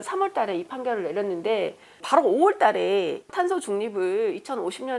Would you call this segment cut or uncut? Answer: cut